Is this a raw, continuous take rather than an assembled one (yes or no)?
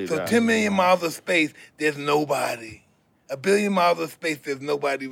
yes